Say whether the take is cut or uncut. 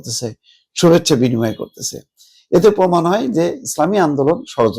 uncut